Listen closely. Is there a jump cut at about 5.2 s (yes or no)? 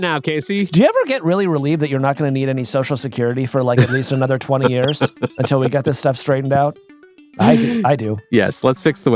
no